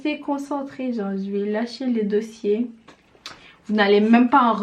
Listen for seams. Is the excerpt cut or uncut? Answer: uncut